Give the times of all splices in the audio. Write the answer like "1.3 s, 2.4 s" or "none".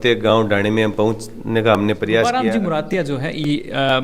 2.3 s